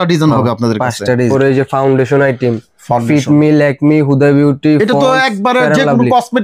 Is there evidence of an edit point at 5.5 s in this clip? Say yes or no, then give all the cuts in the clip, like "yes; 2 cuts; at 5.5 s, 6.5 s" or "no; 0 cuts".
no; 1 cut; at 1.3 s